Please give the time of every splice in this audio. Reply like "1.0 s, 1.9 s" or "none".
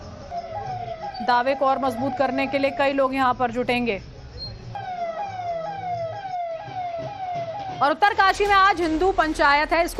none